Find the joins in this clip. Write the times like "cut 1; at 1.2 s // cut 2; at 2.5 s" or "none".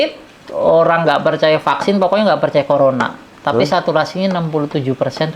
none

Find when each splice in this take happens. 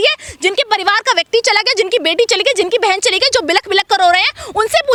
none

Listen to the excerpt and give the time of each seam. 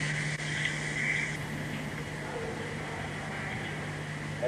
none

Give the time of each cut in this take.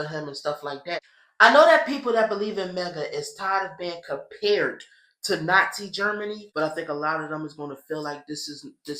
cut 1; at 1.0 s // cut 2; at 6.4 s

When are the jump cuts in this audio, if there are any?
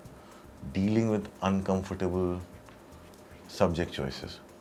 none

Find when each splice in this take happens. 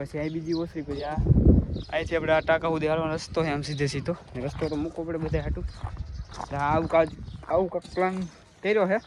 none

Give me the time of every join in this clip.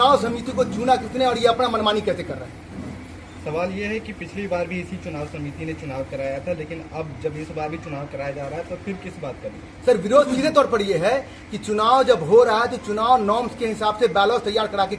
none

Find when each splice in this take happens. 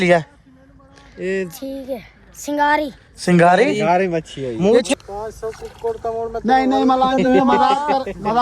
cut 1; at 4.9 s

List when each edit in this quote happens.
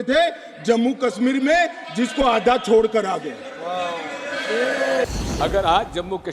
cut 1; at 5.0 s

